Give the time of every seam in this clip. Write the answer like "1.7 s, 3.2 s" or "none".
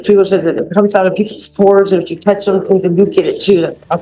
none